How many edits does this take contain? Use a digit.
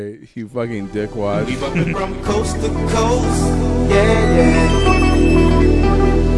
1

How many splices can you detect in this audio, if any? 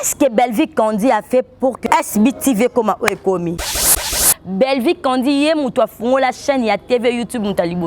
2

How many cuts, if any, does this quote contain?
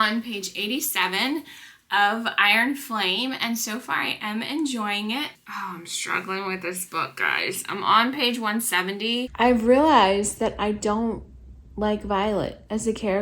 2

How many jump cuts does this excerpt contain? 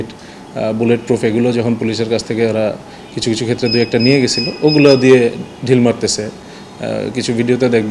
0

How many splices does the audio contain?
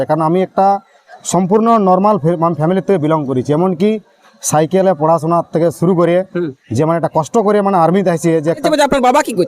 1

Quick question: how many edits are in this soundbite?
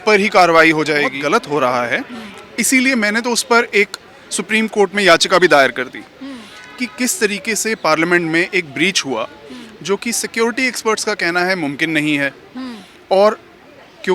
1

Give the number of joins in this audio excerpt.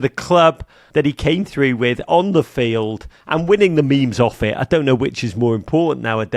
0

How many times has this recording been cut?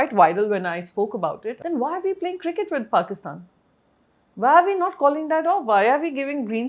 1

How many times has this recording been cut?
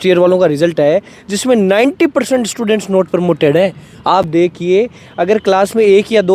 0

